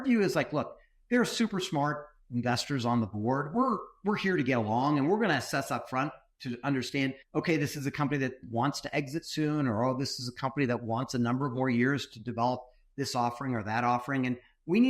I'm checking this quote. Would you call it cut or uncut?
cut